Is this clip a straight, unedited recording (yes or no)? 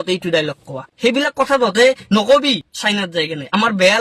no